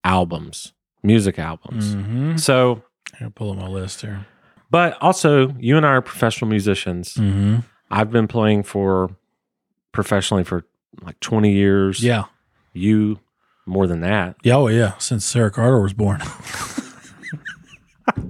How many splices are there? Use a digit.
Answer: 1